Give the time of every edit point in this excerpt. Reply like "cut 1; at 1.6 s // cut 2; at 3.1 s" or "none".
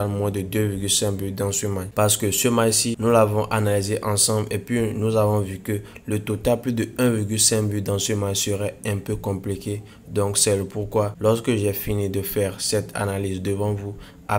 none